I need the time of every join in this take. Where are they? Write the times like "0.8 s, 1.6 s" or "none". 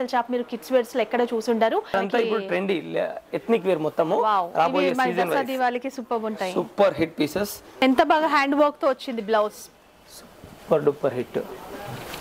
1.9 s, 7.6 s